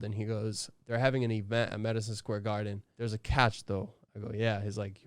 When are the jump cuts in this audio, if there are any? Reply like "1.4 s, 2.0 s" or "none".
2.8 s